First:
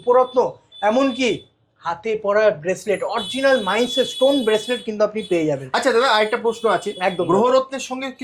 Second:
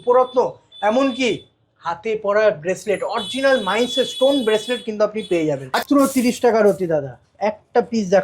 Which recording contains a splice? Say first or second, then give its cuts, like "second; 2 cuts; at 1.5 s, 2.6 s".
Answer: second; 1 cut; at 5.8 s